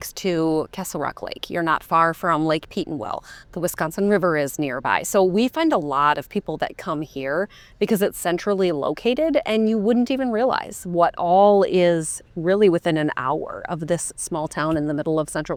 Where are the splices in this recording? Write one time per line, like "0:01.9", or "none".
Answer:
none